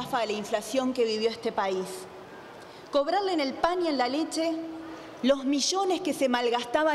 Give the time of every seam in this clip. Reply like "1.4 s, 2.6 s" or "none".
none